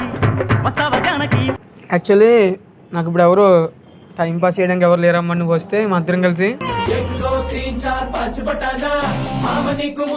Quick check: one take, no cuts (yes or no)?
no